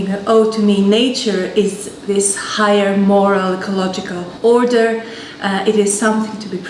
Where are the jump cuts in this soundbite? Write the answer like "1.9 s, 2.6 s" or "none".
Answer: 2.7 s